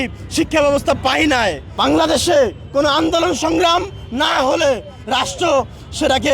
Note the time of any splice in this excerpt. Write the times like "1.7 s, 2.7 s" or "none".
1.7 s